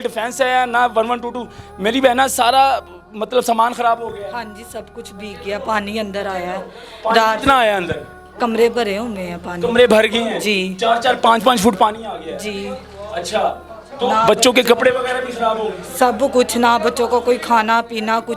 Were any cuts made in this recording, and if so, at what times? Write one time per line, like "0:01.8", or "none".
none